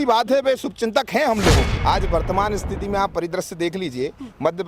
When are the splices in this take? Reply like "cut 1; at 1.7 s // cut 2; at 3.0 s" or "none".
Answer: cut 1; at 1.7 s